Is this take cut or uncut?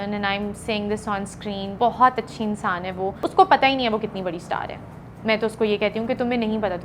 cut